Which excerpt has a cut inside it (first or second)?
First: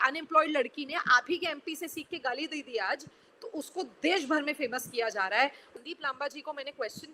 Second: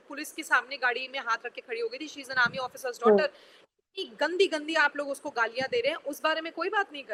first